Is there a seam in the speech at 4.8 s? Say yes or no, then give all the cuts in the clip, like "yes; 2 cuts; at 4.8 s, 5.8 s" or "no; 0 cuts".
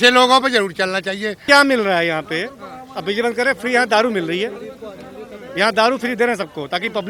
no; 1 cut; at 1.4 s